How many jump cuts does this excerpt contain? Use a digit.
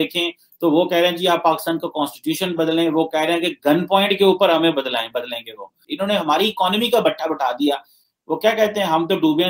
1